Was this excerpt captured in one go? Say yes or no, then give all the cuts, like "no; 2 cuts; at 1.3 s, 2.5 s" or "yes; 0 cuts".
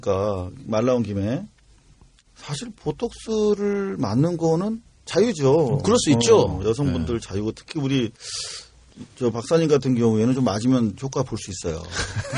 no; 1 cut; at 7.1 s